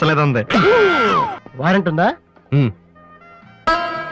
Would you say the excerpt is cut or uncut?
cut